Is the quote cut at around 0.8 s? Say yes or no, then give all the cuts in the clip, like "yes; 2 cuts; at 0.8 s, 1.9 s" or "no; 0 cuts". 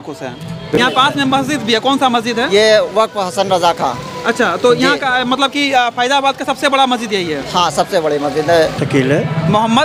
yes; 2 cuts; at 0.8 s, 8.7 s